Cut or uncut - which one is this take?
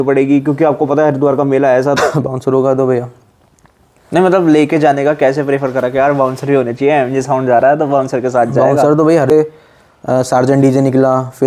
cut